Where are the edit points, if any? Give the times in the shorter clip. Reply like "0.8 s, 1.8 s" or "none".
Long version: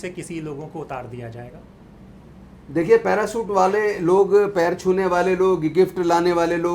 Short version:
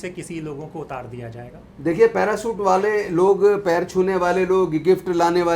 1.6 s